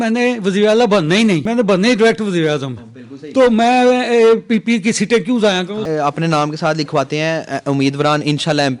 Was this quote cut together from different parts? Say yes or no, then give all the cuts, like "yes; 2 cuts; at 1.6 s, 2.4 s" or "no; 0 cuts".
yes; 2 cuts; at 1.4 s, 5.8 s